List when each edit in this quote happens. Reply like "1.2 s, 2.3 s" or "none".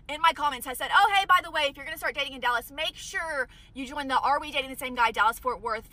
none